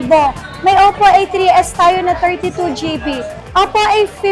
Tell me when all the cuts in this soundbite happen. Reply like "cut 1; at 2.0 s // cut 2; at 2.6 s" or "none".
cut 1; at 3.3 s